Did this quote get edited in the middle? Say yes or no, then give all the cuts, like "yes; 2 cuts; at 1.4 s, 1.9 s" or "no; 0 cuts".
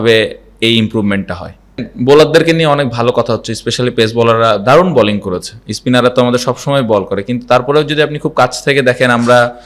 yes; 1 cut; at 1.9 s